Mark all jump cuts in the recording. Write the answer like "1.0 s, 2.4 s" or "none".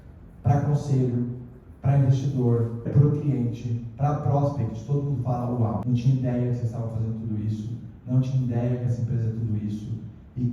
2.9 s, 5.8 s